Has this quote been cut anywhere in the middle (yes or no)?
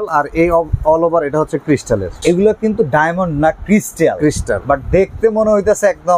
yes